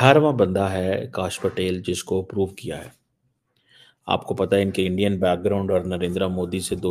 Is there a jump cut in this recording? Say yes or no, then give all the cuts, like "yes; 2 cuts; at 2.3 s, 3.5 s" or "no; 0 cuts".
no; 0 cuts